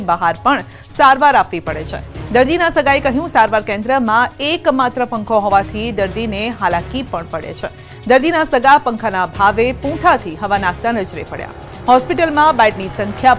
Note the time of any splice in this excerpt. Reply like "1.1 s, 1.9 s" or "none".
12.3 s